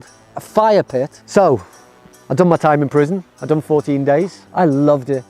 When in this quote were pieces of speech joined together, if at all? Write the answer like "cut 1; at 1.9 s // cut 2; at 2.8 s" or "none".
cut 1; at 1.2 s // cut 2; at 4.4 s